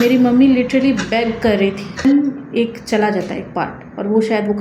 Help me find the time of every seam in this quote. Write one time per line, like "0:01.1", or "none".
0:02.0